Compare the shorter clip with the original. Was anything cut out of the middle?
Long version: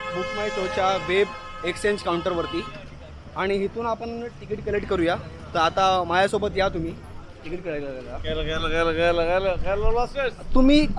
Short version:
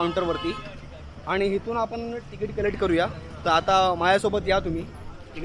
no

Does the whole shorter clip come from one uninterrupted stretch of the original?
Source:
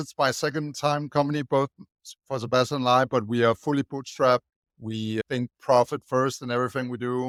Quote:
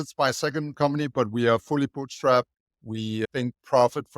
no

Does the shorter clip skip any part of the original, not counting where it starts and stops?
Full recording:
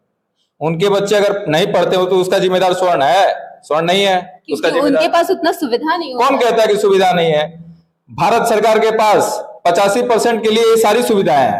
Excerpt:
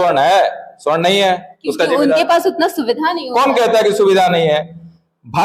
no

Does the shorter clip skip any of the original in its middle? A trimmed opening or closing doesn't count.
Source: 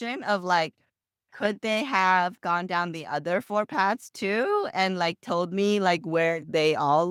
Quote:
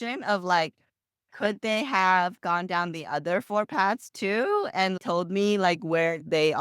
yes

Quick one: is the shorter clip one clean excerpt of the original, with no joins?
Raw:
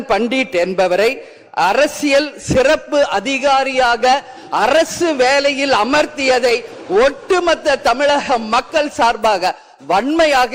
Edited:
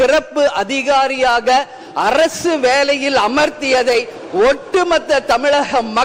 yes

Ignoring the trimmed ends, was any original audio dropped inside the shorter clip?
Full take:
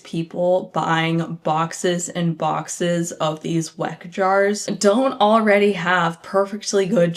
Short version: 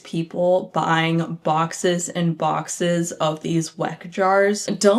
no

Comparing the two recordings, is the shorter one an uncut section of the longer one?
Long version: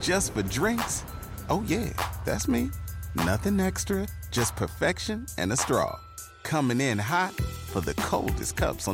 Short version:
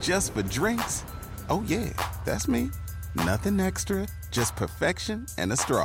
yes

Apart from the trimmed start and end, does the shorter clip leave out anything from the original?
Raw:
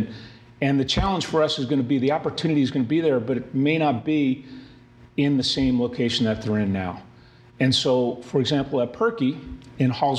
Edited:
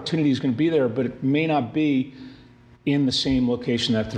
no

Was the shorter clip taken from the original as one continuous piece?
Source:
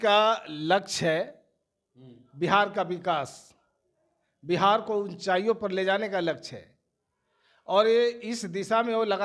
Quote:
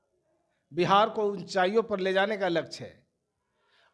yes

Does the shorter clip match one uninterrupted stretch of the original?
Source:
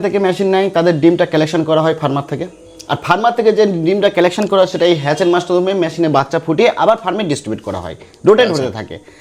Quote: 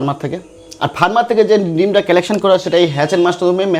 yes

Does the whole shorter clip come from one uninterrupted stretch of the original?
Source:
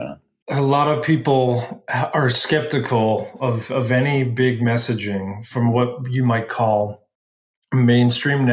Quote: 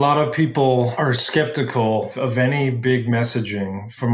no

